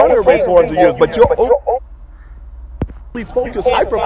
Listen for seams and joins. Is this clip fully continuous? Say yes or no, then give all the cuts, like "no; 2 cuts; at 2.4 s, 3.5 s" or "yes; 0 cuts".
yes; 0 cuts